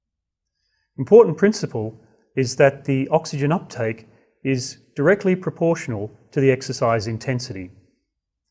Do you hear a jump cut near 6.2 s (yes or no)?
no